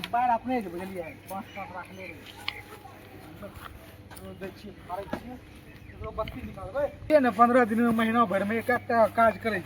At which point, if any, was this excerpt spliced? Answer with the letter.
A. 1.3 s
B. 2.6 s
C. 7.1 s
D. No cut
C